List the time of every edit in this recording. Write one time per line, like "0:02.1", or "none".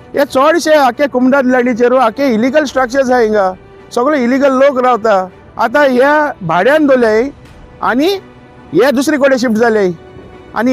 none